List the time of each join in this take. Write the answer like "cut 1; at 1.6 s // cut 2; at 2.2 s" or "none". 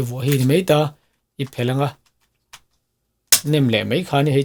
none